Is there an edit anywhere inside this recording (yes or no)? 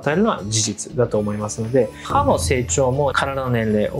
yes